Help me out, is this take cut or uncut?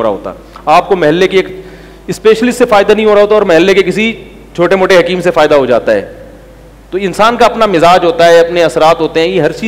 uncut